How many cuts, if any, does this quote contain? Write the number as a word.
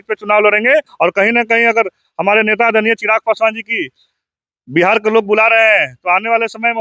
one